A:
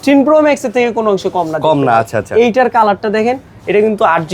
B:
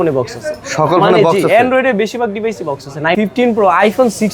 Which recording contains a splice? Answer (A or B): B